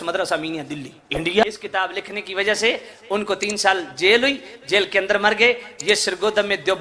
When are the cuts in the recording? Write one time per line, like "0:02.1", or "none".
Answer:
0:01.4